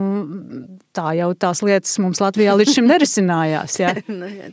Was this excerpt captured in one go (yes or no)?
yes